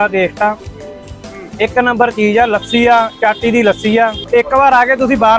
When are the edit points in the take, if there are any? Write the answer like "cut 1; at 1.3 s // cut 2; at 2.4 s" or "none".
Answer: cut 1; at 4.5 s

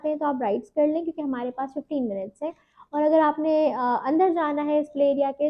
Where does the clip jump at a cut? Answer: none

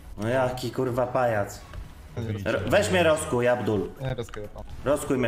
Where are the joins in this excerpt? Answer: cut 1; at 2.3 s

